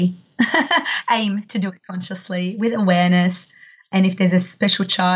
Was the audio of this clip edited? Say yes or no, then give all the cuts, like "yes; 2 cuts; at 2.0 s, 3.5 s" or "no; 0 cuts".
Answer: yes; 1 cut; at 3.9 s